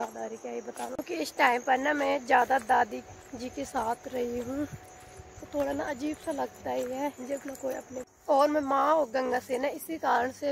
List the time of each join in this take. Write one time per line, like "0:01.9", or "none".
0:00.9
0:08.1